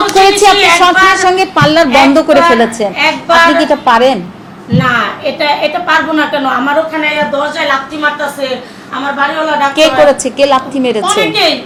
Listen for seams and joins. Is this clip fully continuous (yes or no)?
yes